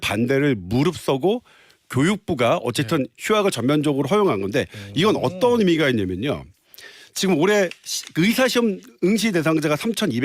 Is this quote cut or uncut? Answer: uncut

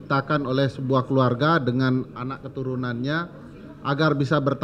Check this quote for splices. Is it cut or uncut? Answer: uncut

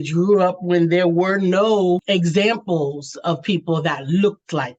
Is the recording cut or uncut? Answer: cut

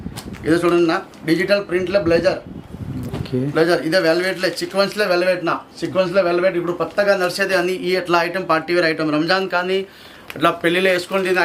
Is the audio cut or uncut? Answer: uncut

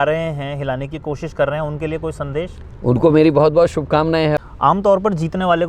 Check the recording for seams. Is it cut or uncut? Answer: cut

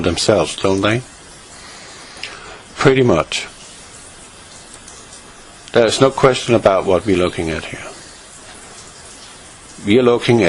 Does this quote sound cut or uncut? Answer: uncut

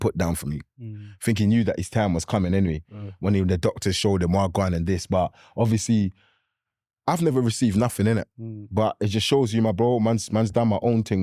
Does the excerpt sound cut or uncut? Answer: uncut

